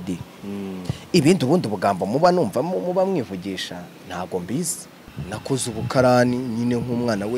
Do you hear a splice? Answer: yes; 1 cut; at 5.1 s

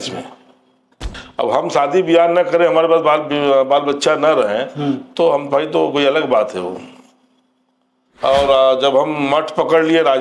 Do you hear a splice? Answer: yes; 1 cut; at 1.0 s

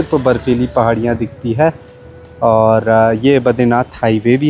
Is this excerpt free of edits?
yes; 0 cuts

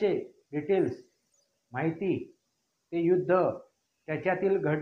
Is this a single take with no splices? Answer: yes; 0 cuts

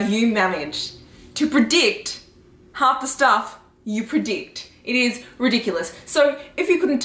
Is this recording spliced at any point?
no; 0 cuts

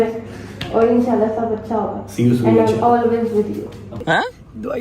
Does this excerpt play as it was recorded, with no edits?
no; 1 cut; at 3.9 s

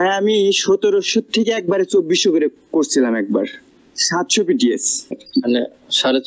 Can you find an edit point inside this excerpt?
yes; 2 cuts; at 3.6 s, 5.2 s

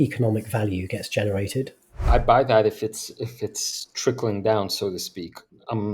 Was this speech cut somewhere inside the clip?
yes; 1 cut; at 2.1 s

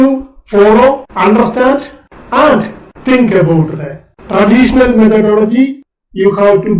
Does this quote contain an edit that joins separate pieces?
yes; 1 cut; at 5.8 s

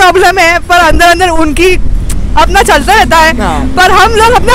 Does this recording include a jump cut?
no; 0 cuts

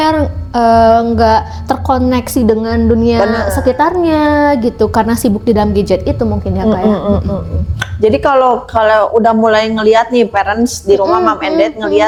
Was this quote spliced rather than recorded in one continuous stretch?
no; 0 cuts

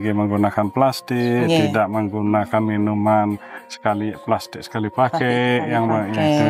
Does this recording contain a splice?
no; 0 cuts

